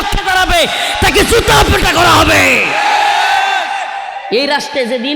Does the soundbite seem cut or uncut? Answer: cut